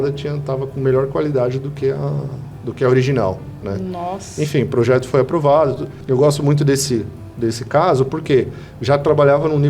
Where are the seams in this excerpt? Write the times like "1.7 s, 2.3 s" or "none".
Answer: 5.9 s